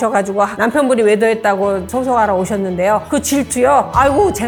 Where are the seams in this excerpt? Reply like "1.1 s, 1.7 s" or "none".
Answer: none

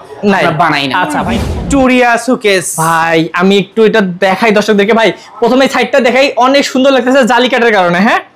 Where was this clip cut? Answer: 1.4 s

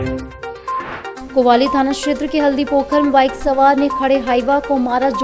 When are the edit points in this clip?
1.2 s

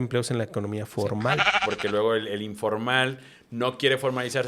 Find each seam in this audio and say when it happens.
1.6 s

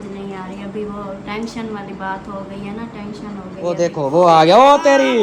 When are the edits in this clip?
3.8 s

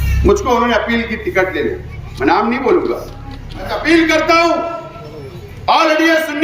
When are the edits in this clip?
3.8 s

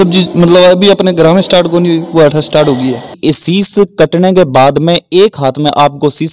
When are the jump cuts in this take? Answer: 3.2 s

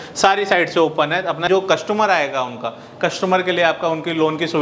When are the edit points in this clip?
1.5 s

